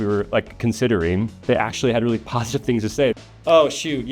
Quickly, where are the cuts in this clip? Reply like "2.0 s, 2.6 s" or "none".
3.1 s